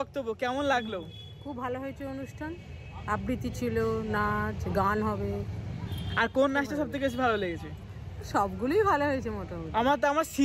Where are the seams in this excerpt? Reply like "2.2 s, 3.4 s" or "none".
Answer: none